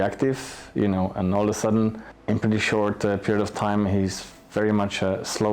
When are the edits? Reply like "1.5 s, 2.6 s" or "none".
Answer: 2.1 s